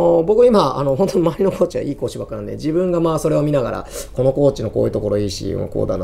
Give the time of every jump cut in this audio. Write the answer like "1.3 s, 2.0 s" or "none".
none